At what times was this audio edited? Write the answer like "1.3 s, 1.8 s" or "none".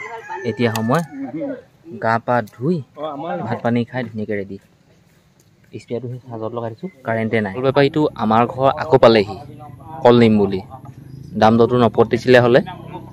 7.7 s